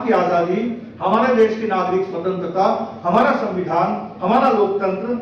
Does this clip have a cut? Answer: no; 0 cuts

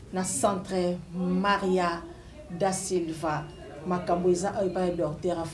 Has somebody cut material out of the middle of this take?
no; 0 cuts

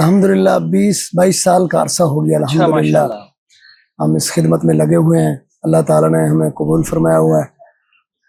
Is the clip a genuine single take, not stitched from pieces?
yes; 0 cuts

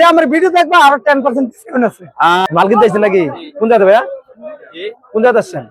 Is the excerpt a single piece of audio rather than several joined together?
no; 1 cut; at 2.4 s

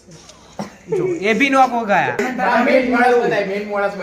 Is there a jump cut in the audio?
yes; 1 cut; at 2.2 s

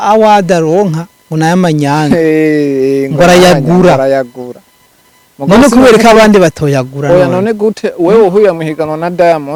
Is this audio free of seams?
yes; 0 cuts

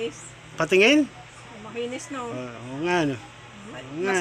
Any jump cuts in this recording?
no; 0 cuts

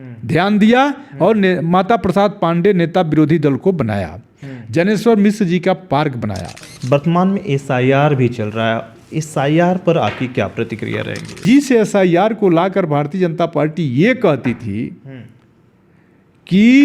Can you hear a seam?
yes; 2 cuts; at 6.6 s, 11.4 s

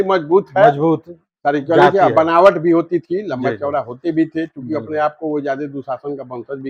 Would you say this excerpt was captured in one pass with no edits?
yes; 0 cuts

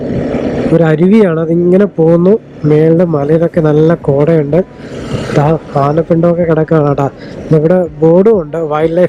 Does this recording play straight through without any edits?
yes; 0 cuts

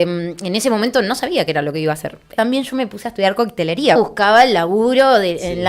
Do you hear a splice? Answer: yes; 2 cuts; at 2.3 s, 4.0 s

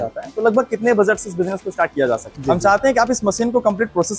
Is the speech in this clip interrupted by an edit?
yes; 1 cut; at 2.3 s

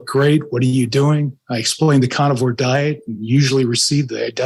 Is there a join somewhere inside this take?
no; 0 cuts

